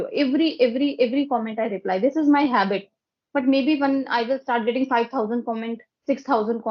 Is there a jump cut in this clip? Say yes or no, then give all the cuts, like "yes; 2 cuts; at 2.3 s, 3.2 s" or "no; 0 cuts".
no; 0 cuts